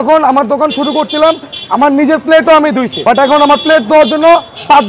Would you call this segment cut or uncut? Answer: cut